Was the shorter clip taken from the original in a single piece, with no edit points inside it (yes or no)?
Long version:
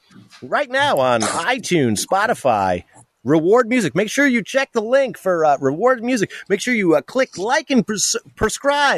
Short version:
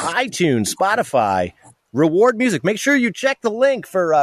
yes